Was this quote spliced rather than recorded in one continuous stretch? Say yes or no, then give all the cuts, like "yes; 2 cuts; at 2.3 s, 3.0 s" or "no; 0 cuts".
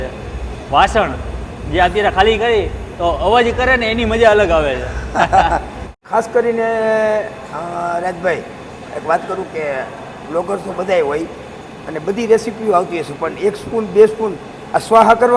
yes; 1 cut; at 5.8 s